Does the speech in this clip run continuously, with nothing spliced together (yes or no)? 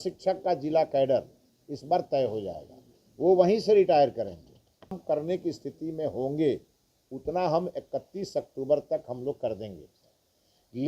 no